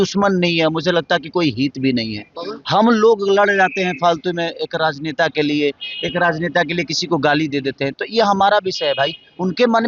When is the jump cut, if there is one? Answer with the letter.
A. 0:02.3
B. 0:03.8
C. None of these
C